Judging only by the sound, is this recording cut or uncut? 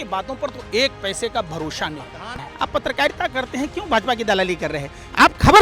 cut